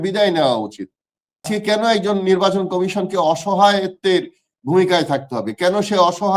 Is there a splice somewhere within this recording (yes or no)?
yes